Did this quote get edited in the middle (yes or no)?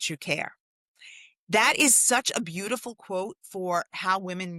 no